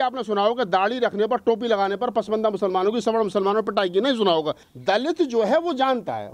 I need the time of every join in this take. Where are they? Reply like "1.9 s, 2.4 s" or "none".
4.7 s